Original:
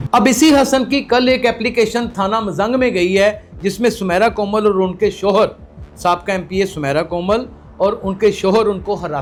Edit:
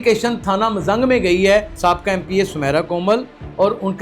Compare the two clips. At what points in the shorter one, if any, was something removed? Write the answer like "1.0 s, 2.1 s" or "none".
1.7 s